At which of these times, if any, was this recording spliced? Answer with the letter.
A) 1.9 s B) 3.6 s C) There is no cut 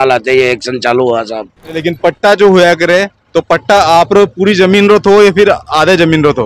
A